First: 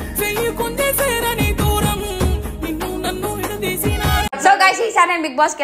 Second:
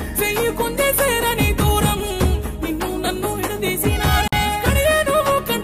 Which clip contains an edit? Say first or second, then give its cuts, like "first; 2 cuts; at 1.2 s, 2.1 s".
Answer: first; 1 cut; at 4.3 s